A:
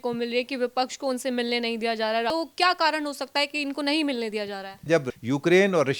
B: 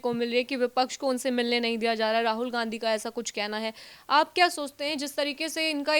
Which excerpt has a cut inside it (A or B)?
A